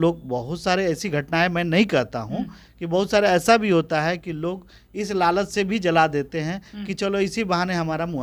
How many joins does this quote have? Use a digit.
0